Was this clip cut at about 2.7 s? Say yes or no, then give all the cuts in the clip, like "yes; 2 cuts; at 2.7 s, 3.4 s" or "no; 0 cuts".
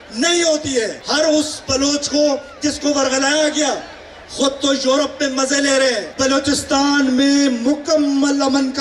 no; 2 cuts; at 1.0 s, 6.1 s